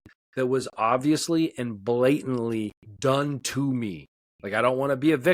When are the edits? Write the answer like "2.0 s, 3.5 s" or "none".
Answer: 2.8 s